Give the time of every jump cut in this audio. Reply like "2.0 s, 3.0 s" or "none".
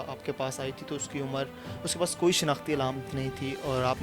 none